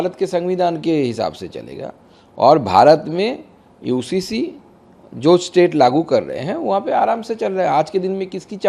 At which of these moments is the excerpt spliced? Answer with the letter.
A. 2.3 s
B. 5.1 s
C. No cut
C